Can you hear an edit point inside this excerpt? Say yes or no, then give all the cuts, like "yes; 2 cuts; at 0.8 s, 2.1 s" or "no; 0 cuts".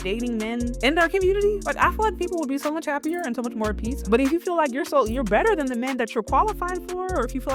yes; 3 cuts; at 0.8 s, 1.7 s, 3.9 s